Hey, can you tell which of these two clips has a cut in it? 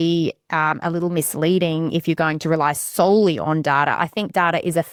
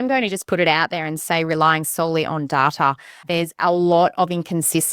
second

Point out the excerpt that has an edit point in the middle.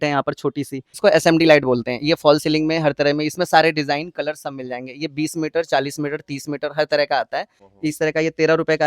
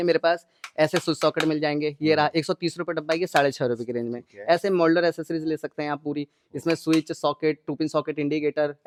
first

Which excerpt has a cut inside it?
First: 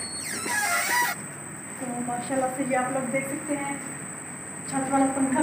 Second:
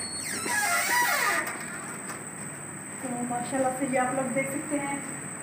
first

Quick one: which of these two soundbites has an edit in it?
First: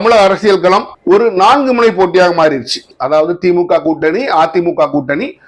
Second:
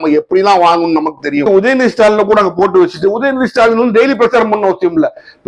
second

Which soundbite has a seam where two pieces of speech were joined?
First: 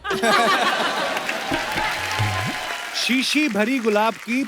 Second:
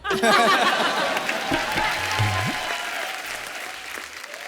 first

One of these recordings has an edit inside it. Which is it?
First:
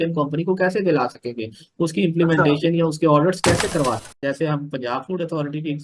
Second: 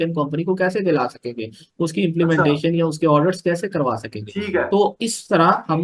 first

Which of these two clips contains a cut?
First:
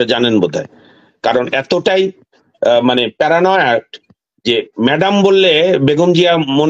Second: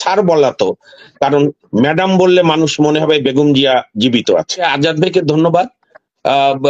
second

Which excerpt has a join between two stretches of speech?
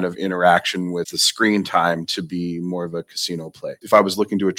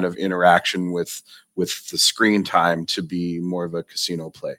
first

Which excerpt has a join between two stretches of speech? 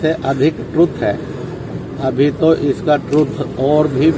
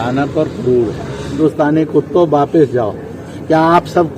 second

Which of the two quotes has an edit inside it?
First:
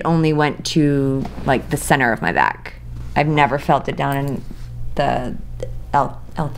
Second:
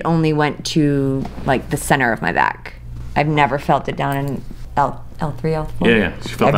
second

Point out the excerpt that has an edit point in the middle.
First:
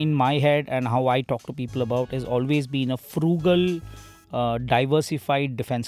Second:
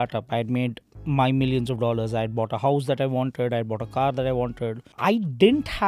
second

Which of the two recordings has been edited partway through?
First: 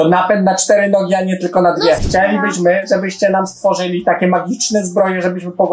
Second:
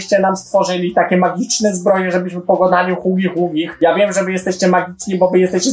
first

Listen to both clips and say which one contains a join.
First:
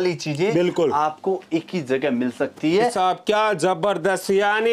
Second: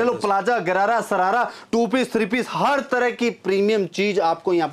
first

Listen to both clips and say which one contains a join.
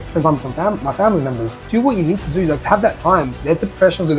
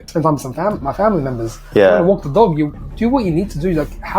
first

